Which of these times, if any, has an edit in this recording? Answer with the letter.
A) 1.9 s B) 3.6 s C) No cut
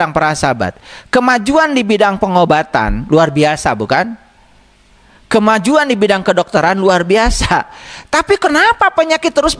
C